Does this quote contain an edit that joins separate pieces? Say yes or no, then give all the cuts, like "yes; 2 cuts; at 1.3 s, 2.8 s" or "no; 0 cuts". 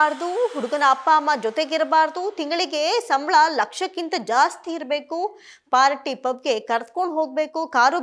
no; 0 cuts